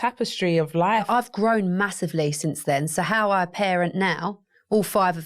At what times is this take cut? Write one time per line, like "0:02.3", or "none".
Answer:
0:01.1